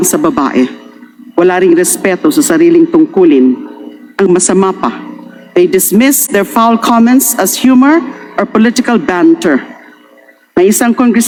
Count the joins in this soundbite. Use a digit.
0